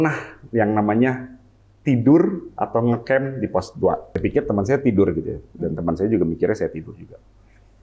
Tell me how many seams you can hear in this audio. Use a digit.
1